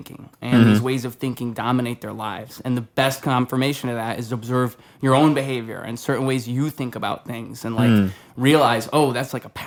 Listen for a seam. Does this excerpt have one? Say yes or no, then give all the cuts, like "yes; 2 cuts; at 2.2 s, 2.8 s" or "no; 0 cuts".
no; 0 cuts